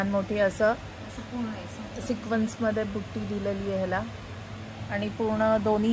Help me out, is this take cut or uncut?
uncut